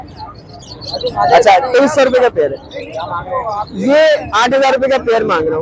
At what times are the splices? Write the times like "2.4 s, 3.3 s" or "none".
none